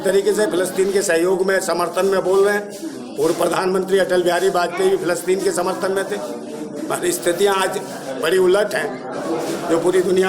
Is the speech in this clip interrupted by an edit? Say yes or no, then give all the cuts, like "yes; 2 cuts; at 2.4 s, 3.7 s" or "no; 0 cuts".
no; 0 cuts